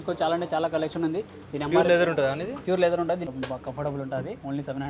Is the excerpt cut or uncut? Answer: cut